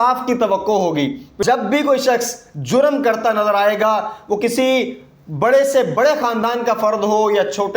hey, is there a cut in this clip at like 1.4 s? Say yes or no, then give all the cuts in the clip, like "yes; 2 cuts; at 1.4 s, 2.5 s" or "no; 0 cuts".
yes; 1 cut; at 1.4 s